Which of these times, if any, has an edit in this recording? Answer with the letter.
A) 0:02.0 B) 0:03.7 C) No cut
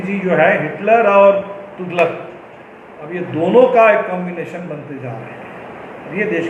C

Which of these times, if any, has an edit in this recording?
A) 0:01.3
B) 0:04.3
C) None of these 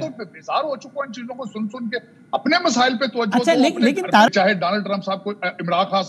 B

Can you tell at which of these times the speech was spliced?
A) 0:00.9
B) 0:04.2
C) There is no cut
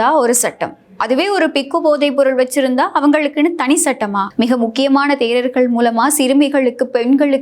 B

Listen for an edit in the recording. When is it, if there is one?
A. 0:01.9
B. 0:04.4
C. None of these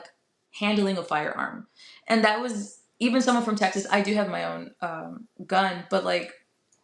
C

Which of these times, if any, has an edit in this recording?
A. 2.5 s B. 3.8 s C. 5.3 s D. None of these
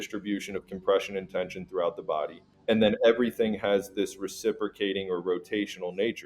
A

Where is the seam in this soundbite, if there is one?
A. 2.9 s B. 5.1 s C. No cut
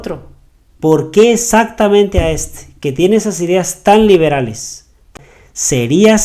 B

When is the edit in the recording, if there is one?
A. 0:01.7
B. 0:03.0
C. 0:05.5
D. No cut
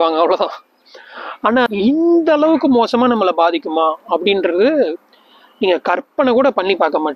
A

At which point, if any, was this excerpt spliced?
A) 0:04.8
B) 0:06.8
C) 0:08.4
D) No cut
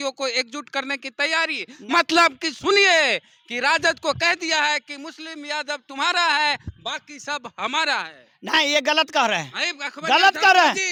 D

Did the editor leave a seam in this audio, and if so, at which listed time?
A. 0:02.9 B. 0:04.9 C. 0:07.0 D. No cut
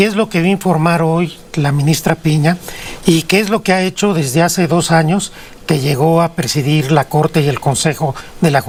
D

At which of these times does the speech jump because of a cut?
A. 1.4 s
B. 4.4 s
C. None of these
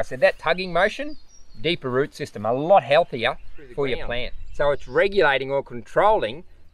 B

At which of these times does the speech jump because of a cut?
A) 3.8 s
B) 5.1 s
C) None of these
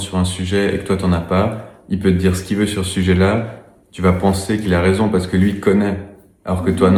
C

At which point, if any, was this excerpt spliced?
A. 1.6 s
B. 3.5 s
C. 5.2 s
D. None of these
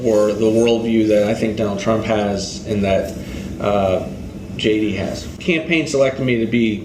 C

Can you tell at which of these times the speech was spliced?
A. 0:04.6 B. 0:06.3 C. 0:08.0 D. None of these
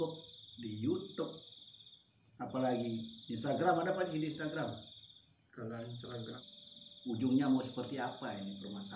B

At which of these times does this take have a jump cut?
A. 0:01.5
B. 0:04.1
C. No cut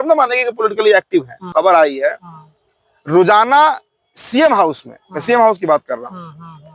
A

